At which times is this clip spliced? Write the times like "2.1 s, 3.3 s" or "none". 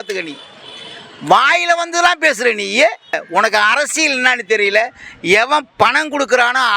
3.2 s